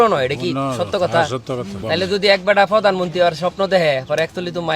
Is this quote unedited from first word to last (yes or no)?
no